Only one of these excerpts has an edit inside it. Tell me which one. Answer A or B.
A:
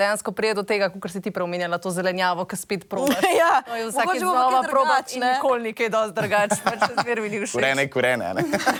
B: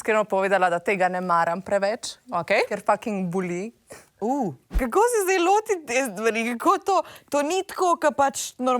B